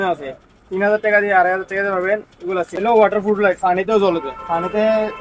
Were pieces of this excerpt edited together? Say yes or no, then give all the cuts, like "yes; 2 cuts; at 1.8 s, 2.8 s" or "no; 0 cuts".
yes; 1 cut; at 2.8 s